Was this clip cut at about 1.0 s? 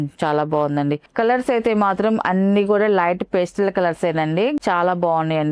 no; 1 cut; at 4.6 s

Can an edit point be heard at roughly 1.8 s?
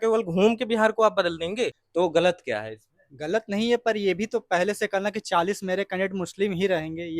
yes; 1 cut; at 1.8 s

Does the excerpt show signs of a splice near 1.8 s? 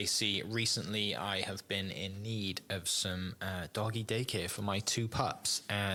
no; 0 cuts

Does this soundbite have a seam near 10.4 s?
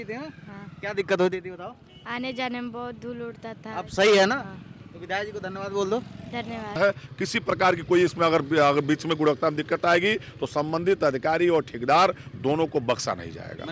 no; 1 cut; at 6.8 s

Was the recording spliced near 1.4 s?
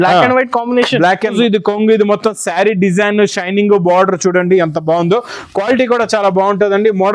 yes; 1 cut; at 1.4 s

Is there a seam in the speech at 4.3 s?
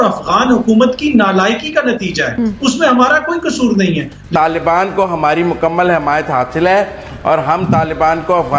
yes; 1 cut; at 4.3 s

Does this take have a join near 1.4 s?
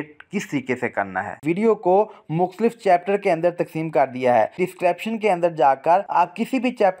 yes; 3 cuts; at 1.4 s, 4.6 s, 6.1 s

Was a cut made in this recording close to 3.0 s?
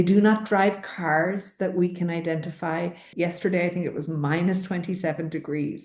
yes; 1 cut; at 3.0 s

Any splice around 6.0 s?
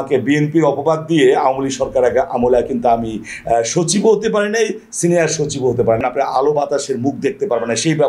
yes; 1 cut; at 6.0 s

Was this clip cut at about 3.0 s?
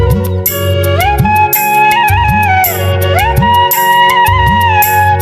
yes; 1 cut; at 3.0 s

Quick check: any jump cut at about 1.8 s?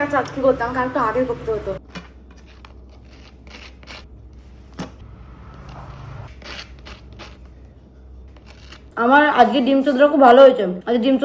no; 0 cuts

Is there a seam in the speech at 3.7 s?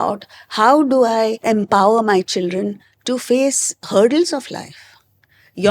yes; 2 cuts; at 1.4 s, 3.7 s

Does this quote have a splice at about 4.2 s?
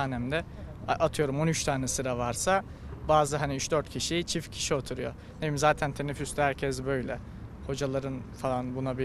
no; 0 cuts

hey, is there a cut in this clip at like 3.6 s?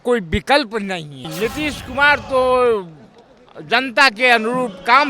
no; 1 cut; at 1.3 s

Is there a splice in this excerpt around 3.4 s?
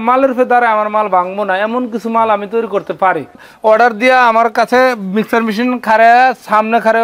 yes; 1 cut; at 3.4 s

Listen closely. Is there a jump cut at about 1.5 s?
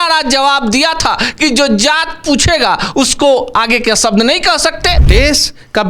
no; 1 cut; at 5.0 s

